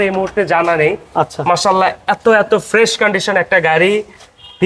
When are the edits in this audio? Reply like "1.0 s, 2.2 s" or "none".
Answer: none